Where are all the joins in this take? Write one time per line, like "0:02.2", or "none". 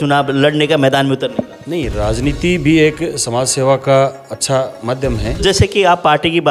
0:05.4